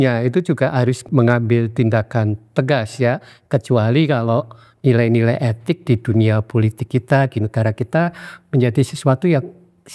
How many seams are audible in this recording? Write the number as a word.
one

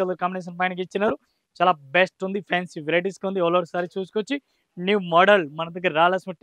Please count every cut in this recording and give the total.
zero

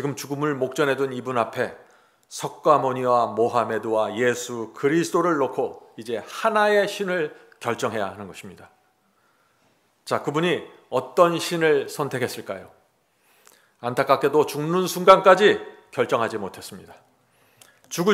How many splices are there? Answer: zero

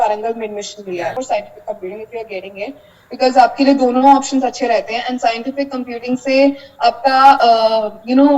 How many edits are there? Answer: one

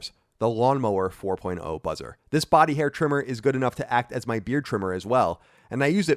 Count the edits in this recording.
one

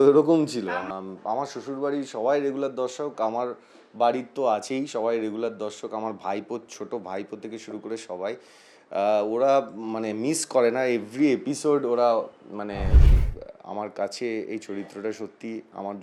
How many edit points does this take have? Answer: two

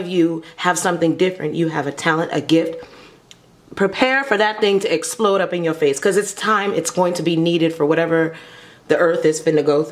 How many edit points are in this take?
zero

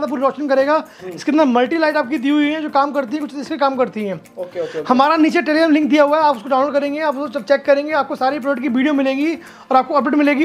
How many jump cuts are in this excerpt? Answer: zero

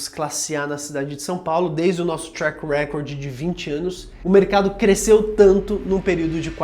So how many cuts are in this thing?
one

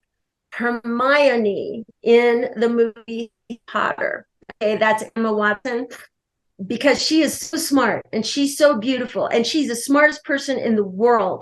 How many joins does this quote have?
one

